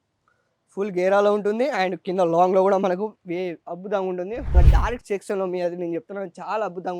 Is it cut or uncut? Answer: cut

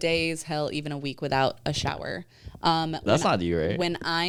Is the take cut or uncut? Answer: uncut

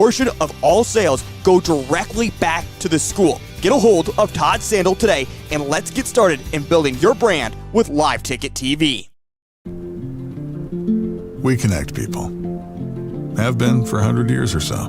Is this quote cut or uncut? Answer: cut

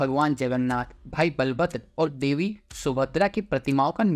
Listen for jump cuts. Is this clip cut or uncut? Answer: uncut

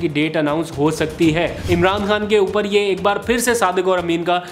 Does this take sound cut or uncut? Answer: cut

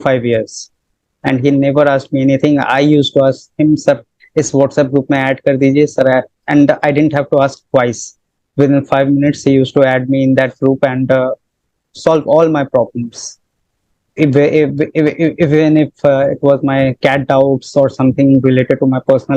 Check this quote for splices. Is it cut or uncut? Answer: uncut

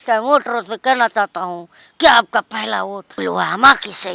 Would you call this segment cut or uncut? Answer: cut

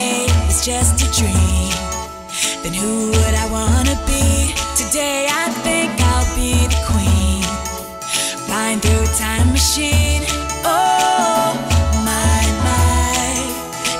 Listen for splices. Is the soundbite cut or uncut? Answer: uncut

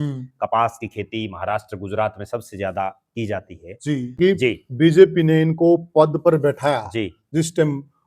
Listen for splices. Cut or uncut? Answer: cut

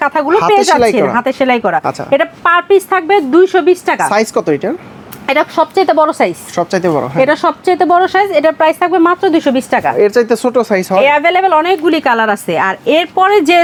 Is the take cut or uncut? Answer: uncut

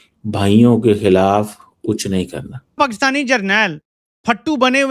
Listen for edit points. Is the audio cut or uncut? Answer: cut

